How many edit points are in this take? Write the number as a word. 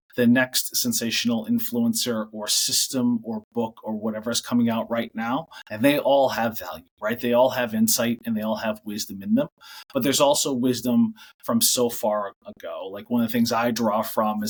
zero